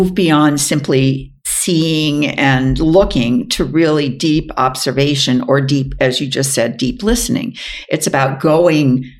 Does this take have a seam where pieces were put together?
no; 0 cuts

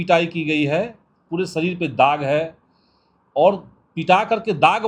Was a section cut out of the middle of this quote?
no; 0 cuts

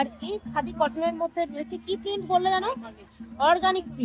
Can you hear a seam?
no; 0 cuts

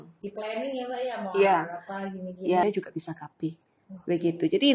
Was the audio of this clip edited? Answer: yes; 1 cut; at 2.6 s

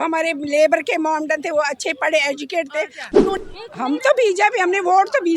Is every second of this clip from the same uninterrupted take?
no; 1 cut; at 3.4 s

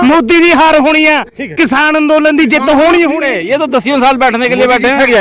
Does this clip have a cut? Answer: yes; 1 cut; at 3.3 s

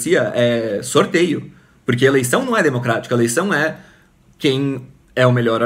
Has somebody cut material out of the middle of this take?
no; 0 cuts

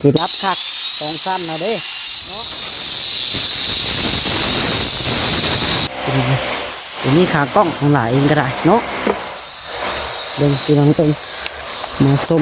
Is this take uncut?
no; 1 cut; at 5.9 s

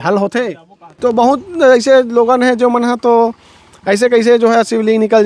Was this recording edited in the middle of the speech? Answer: yes; 1 cut; at 1.0 s

